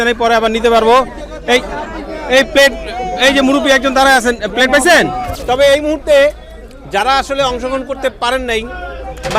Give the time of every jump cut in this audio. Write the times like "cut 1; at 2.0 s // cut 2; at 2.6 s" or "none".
cut 1; at 5.3 s